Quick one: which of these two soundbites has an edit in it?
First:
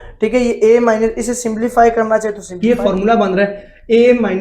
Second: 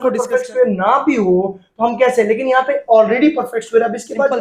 first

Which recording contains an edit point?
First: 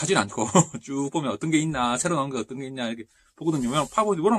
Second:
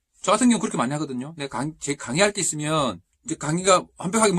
second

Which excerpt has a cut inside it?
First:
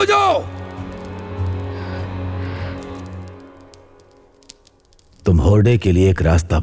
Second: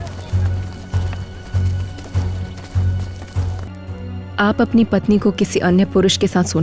second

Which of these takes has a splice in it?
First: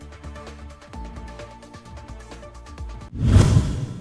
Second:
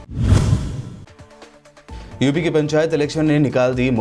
first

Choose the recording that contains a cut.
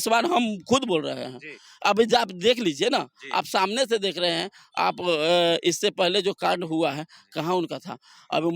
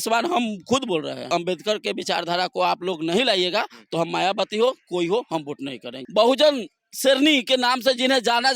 second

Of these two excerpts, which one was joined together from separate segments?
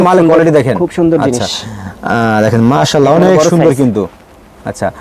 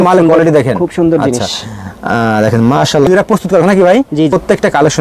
second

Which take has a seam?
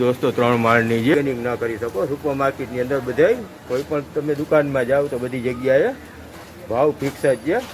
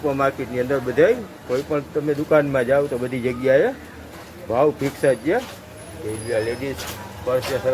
first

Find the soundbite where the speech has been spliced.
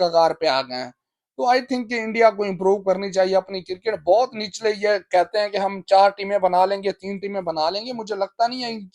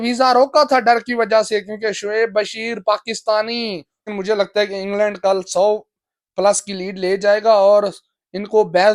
second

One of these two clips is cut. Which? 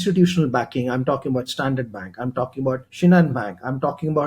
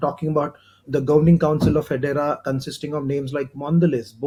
first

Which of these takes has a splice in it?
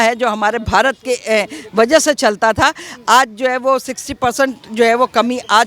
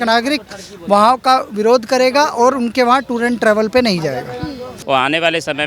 second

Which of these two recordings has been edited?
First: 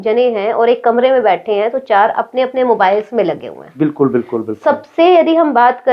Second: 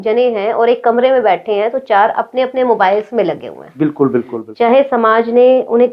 second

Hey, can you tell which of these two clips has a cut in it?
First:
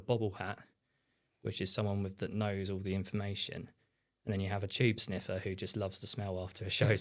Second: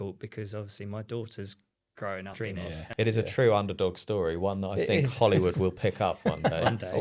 second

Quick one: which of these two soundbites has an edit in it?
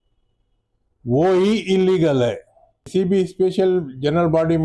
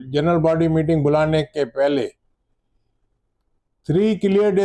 first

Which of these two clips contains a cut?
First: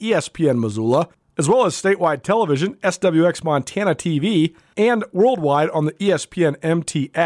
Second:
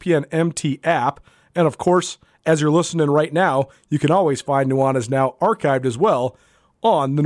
first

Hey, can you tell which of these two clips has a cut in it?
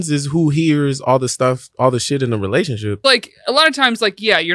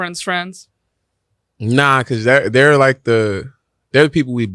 first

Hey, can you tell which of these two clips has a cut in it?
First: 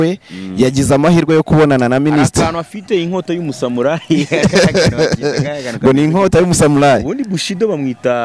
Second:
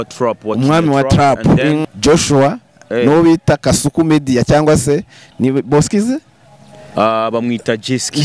second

